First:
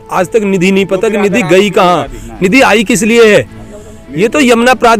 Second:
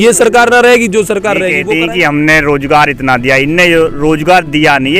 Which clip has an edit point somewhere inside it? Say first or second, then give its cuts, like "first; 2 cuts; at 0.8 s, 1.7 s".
second; 1 cut; at 1.6 s